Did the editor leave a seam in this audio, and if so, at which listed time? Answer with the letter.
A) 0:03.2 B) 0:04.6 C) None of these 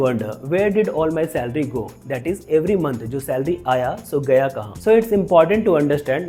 C